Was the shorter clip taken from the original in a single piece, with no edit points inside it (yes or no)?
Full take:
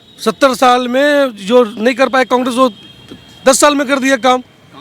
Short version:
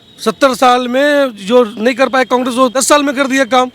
no